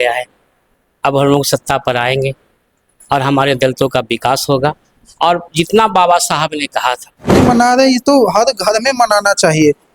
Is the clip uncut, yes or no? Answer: no